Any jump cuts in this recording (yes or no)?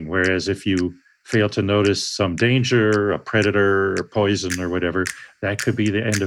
no